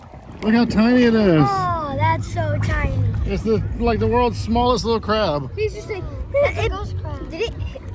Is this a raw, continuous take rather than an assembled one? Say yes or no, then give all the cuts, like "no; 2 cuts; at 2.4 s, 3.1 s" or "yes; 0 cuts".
yes; 0 cuts